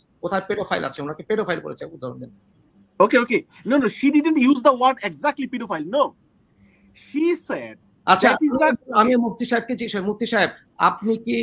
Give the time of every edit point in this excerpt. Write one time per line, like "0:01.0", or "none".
none